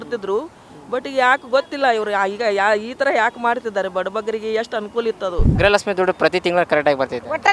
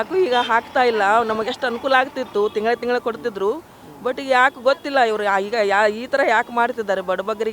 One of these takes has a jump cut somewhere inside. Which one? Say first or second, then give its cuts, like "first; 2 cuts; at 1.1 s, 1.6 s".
first; 1 cut; at 5.5 s